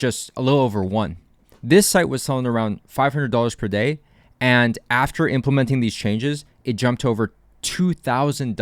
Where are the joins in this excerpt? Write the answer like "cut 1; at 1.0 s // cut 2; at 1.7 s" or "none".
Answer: cut 1; at 1.4 s